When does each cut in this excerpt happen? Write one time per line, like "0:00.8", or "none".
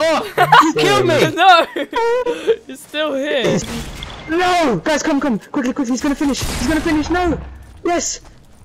0:03.6